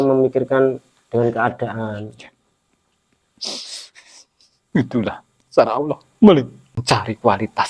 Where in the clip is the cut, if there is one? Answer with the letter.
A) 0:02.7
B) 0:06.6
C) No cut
B